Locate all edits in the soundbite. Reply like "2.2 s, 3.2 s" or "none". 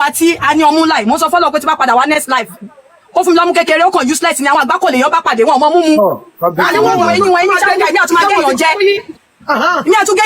1.8 s